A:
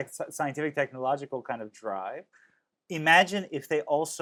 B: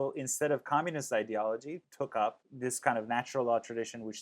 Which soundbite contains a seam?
B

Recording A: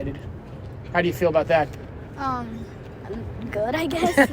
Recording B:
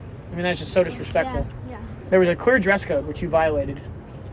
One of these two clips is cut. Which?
B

